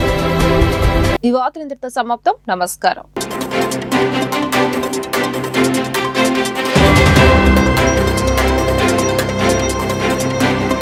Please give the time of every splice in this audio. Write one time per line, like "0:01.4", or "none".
none